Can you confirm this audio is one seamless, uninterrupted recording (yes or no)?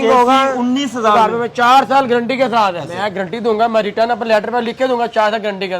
no